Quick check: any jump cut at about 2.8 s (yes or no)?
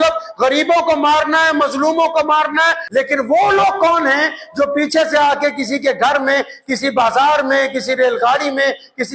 yes